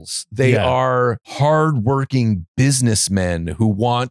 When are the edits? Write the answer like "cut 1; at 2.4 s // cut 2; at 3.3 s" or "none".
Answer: cut 1; at 1.3 s

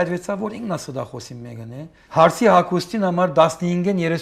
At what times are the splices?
cut 1; at 2.0 s

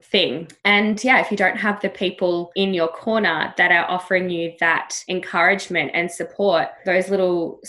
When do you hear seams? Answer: cut 1; at 2.5 s // cut 2; at 4.9 s

